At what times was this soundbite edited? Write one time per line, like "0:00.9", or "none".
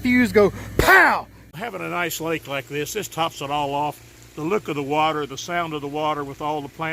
0:01.4